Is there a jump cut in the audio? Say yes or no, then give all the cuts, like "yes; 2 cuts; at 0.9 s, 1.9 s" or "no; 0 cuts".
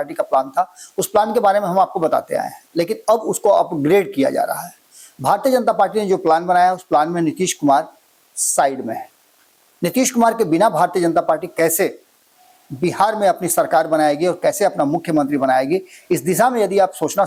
no; 0 cuts